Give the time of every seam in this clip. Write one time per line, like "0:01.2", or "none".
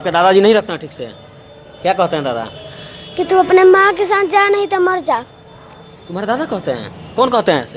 none